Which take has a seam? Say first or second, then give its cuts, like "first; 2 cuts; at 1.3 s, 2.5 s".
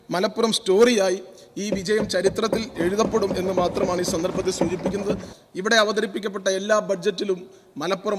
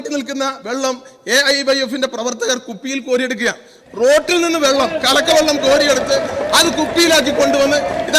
first; 1 cut; at 5.4 s